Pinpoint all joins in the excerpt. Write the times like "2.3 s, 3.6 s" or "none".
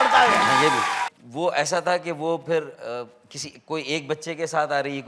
1.1 s